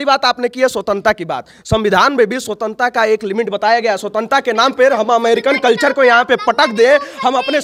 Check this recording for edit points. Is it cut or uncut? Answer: uncut